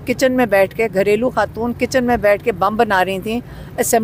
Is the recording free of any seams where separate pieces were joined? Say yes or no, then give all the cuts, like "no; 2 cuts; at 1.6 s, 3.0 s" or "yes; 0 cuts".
yes; 0 cuts